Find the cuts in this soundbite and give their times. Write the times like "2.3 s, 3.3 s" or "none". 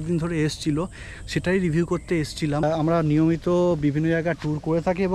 2.6 s